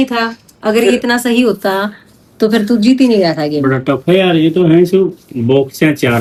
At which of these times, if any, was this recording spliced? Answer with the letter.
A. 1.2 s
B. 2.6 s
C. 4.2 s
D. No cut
D